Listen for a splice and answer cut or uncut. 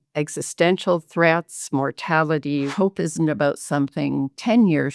cut